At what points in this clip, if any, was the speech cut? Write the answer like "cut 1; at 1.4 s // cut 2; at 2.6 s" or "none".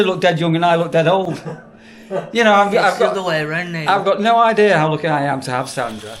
none